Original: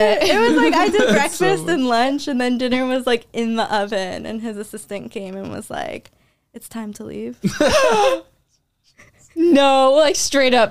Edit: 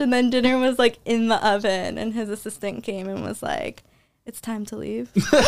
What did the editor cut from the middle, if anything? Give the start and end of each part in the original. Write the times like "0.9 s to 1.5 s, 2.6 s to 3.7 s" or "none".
none

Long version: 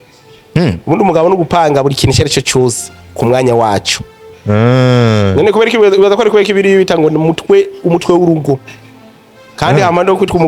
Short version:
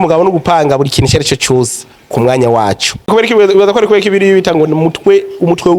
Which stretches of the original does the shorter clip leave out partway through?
4.2 s to 5.5 s

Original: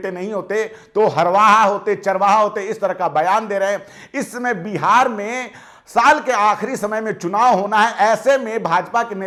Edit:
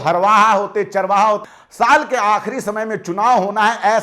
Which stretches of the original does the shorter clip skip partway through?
2.6 s to 5.7 s

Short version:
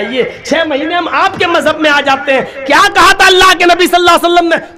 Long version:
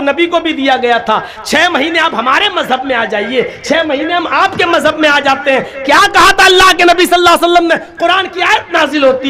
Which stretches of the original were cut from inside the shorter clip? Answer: none

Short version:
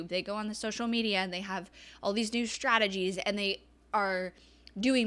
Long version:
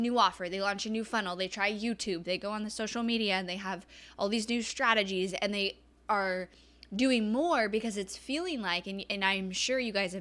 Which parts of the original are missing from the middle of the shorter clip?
none

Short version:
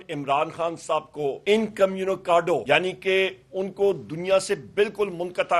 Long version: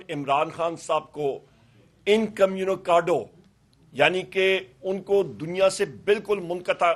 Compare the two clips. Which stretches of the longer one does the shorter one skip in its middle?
1.4 s to 2.0 s, 3.2 s to 3.9 s

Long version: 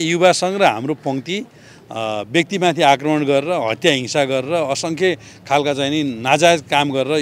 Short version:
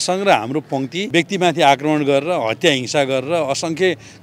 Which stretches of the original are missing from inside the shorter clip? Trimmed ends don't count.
1.4 s to 2.3 s

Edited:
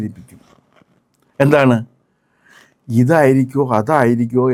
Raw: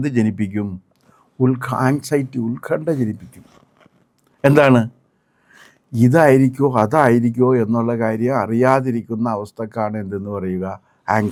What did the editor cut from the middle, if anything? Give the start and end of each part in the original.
none

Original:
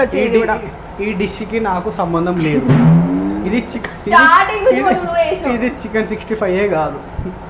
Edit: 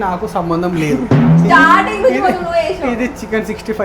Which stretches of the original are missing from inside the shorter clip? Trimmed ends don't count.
2.7 s to 3.6 s

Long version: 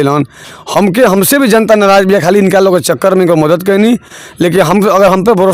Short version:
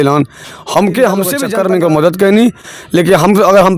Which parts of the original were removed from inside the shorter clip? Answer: 1.4 s to 2.9 s

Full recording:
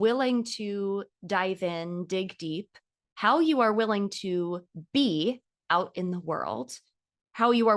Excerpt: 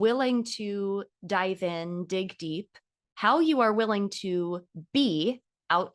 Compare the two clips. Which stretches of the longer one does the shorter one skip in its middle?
none

